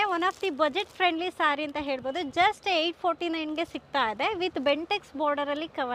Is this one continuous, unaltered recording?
yes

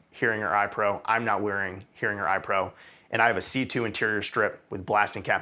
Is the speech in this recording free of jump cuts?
yes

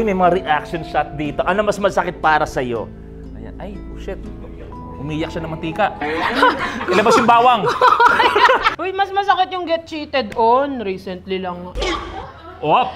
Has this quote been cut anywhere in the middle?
yes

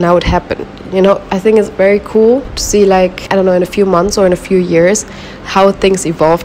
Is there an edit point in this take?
no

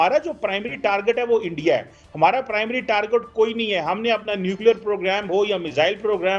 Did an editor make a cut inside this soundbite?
no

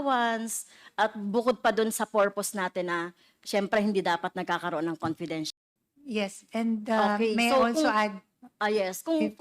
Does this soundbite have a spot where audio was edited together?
yes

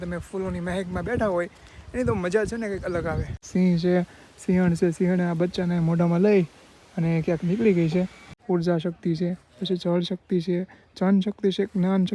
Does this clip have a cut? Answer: yes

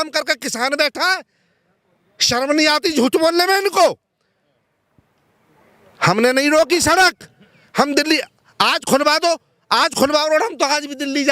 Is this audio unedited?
yes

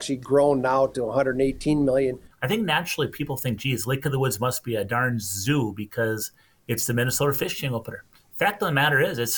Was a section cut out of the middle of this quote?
yes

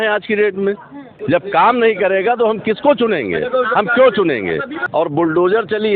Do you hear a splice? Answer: yes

